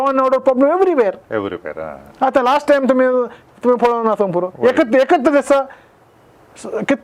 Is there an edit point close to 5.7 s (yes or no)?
no